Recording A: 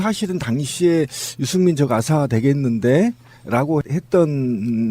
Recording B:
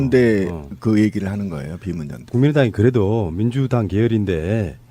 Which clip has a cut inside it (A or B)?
B